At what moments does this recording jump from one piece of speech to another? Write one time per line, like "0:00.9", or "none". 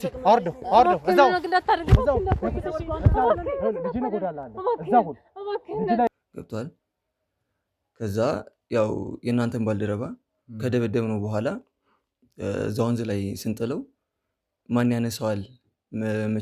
0:06.1